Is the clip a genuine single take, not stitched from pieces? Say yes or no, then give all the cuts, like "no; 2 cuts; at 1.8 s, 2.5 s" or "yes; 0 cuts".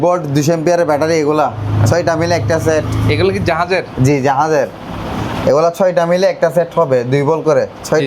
yes; 0 cuts